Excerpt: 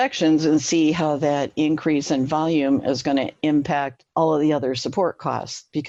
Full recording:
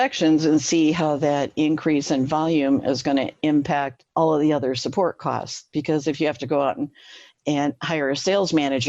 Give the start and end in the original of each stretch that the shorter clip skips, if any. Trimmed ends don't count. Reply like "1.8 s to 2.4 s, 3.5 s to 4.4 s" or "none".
none